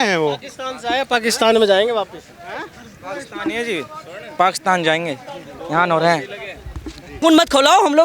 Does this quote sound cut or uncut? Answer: cut